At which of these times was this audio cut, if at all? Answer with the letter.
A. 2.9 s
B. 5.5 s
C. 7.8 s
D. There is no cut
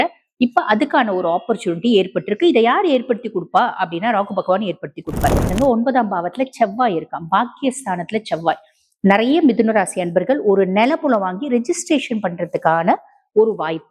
B